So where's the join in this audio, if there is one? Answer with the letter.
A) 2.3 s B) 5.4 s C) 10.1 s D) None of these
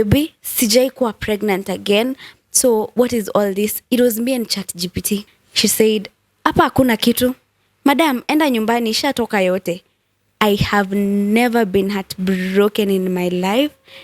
B